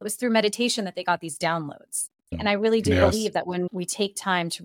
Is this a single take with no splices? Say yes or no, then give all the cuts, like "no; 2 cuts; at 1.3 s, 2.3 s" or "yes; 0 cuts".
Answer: no; 2 cuts; at 2.4 s, 3.7 s